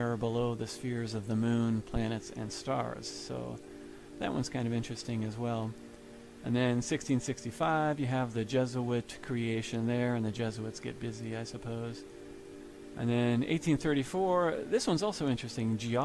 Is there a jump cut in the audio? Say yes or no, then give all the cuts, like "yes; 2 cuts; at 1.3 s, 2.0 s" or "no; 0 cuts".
yes; 1 cut; at 1.9 s